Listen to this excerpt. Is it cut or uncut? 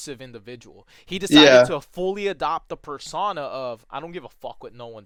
uncut